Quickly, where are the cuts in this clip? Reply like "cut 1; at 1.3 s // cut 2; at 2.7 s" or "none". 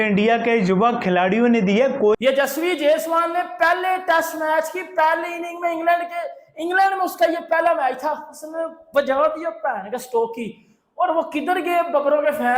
cut 1; at 2.2 s